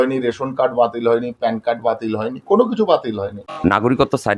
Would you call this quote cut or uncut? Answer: cut